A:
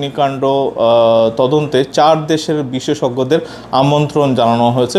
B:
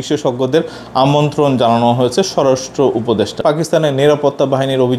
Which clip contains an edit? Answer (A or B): B